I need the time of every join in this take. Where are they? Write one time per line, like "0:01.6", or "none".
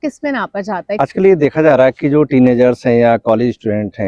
0:01.0

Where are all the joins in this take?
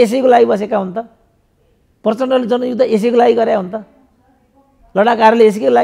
none

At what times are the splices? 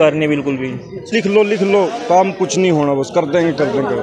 0:01.1

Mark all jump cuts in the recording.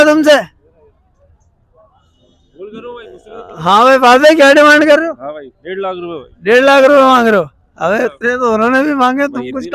none

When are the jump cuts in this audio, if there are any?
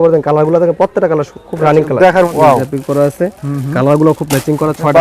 0:02.3

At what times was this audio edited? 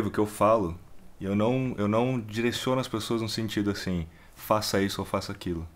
none

